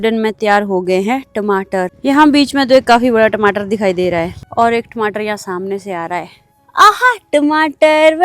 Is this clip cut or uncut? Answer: uncut